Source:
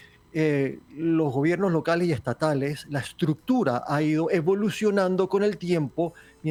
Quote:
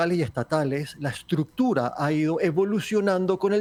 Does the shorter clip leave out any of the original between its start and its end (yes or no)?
no